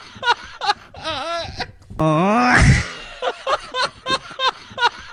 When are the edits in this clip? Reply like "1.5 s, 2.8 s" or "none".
none